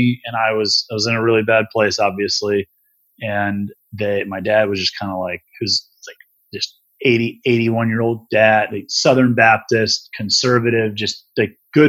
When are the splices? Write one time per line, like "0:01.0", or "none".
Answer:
none